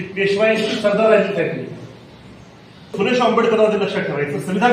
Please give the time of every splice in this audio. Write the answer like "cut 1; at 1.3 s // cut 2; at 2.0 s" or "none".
cut 1; at 2.9 s